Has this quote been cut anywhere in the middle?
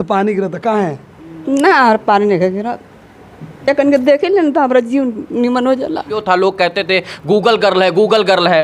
yes; 1 cut; at 6.2 s

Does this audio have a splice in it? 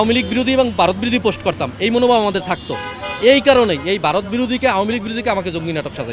no; 0 cuts

